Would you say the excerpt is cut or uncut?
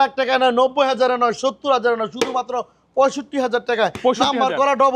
uncut